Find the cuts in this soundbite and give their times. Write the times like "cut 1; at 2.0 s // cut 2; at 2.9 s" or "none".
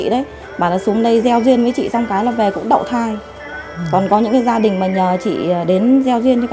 none